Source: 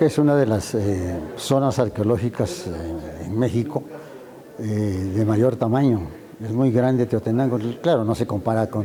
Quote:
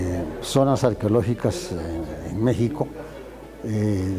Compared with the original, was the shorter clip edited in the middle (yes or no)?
no